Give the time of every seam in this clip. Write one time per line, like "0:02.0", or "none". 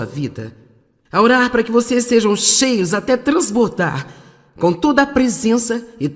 none

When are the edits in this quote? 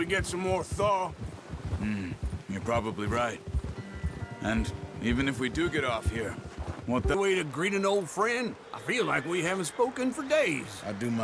0:07.1

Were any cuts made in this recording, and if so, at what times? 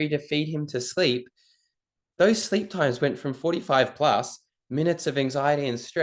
none

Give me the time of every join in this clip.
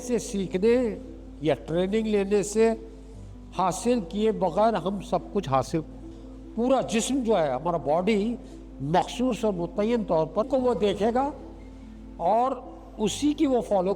0:06.1
0:10.5

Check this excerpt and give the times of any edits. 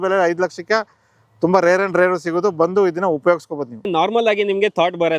0:03.8

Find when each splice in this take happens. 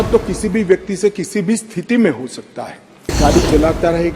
0:03.2

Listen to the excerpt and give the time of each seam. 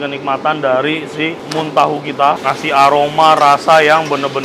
0:02.4

